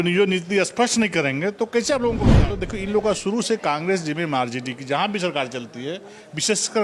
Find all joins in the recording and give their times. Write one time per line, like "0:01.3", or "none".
0:02.3